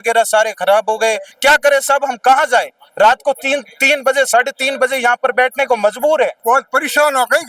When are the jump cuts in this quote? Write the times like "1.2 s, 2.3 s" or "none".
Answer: 1.3 s, 6.3 s